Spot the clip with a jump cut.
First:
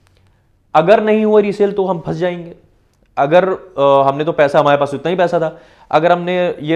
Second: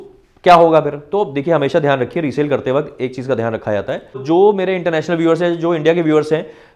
second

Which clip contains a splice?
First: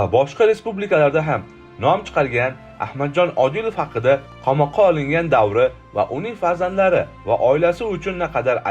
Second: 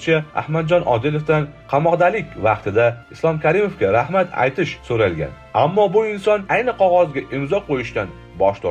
first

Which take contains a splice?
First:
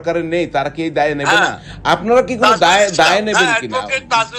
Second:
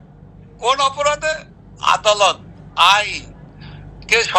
first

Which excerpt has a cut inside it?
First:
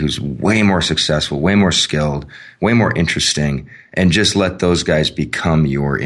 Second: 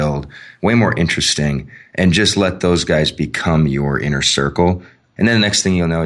second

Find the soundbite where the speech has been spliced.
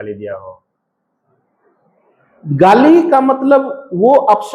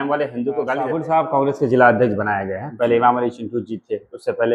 second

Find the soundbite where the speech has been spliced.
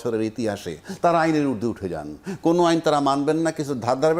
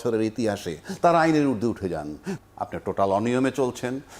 second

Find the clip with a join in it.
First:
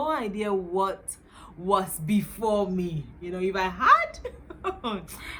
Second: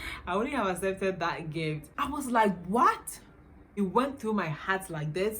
second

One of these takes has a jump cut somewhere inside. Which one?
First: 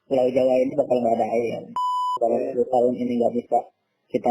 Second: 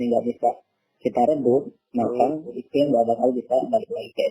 first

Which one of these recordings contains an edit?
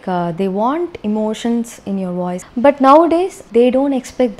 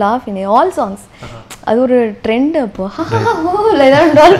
first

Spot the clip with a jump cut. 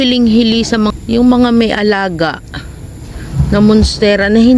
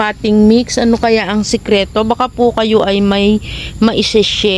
first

